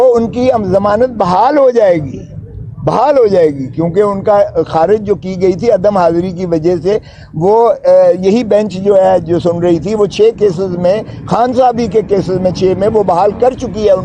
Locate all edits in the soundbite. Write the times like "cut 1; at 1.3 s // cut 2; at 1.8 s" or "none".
none